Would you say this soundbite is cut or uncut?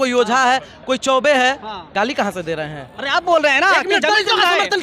cut